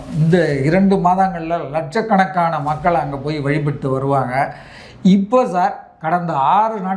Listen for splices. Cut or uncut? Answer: uncut